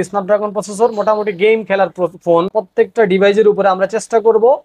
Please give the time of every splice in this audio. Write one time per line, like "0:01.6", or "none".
0:02.6